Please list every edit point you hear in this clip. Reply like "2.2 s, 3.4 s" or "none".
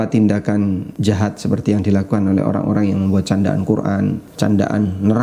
0.9 s, 4.2 s

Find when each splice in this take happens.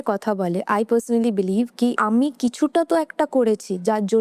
2.0 s

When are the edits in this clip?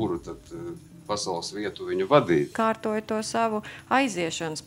2.5 s

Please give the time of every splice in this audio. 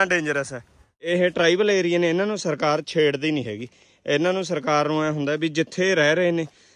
0.9 s

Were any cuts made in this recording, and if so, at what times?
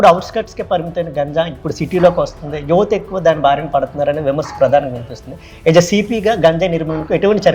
none

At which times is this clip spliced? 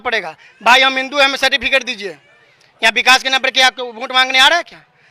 none

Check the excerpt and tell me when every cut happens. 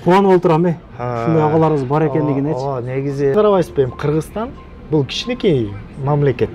3.3 s

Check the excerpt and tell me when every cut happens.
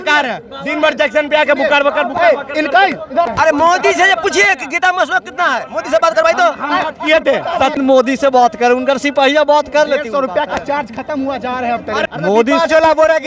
3.3 s, 7.7 s, 12.1 s

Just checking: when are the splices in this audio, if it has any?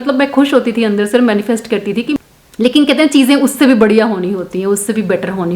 2.2 s

